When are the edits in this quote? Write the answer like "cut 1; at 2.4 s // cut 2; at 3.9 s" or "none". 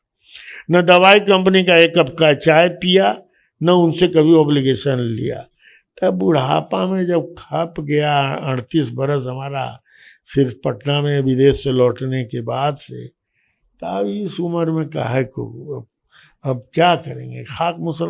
none